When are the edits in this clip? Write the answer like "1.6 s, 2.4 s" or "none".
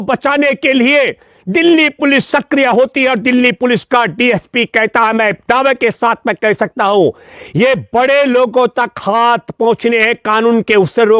none